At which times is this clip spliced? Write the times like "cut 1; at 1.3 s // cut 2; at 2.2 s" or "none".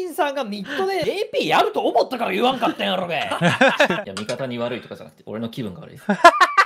cut 1; at 1.0 s // cut 2; at 4.1 s